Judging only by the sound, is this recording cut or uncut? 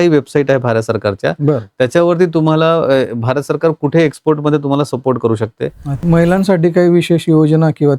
cut